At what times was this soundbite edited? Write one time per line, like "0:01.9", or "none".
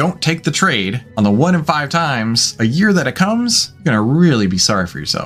0:01.0
0:03.7